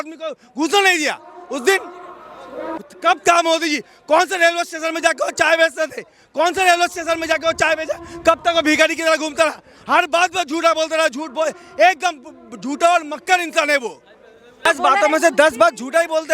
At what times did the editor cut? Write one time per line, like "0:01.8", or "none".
0:02.7
0:14.7